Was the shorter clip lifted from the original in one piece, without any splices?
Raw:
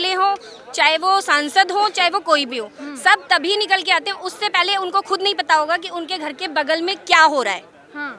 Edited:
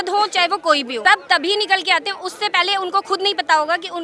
no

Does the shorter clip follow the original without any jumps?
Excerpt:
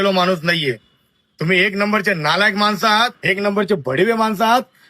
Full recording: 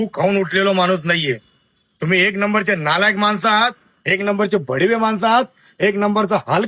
no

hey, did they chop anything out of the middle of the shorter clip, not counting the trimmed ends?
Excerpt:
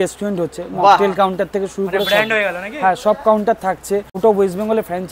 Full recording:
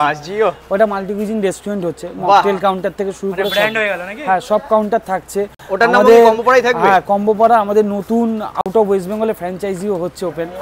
yes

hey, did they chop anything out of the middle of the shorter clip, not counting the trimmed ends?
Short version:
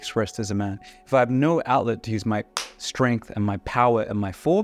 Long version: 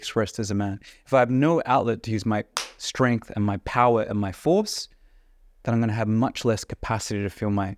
no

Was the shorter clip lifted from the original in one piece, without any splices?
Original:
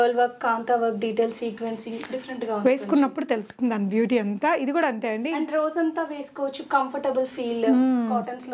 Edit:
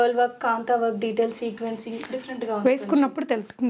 yes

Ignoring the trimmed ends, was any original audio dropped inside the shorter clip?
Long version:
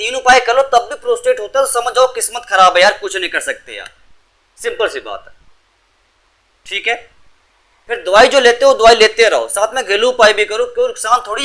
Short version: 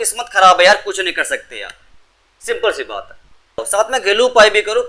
yes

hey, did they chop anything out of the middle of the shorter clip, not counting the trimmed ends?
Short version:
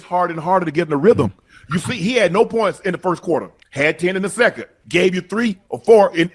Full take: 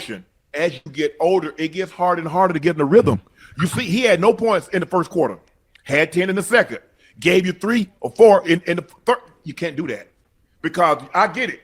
yes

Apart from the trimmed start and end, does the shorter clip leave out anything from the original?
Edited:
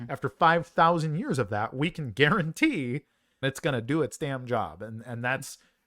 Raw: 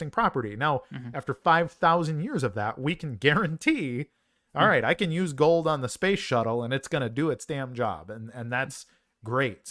yes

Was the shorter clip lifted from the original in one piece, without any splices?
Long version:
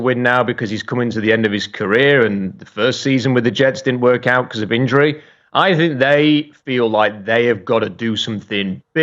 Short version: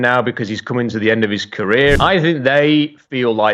no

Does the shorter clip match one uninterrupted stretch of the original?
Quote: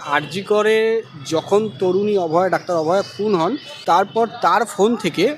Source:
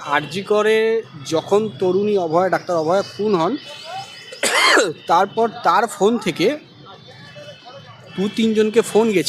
no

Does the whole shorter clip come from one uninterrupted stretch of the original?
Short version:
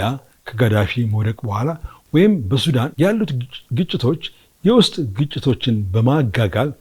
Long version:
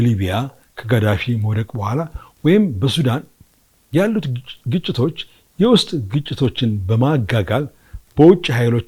no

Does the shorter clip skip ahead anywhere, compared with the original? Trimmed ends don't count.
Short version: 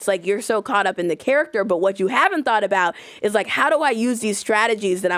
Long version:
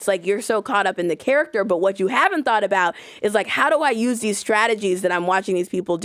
no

